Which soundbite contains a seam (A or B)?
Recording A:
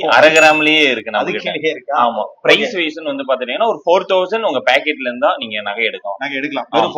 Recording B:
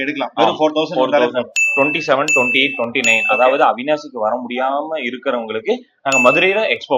B